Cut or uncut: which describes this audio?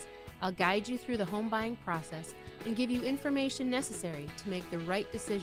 uncut